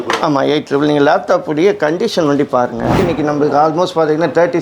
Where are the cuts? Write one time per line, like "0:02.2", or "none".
0:03.0